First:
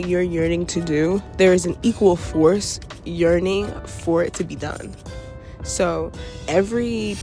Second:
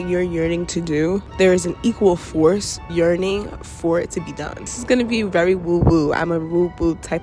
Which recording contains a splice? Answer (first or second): second